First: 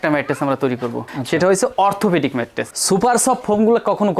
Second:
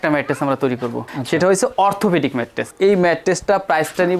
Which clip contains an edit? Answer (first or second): first